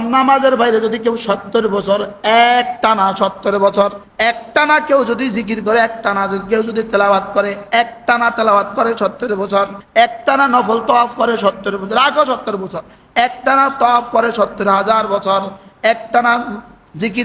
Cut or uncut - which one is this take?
cut